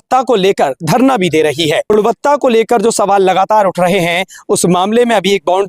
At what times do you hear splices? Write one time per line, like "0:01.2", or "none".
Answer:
0:01.9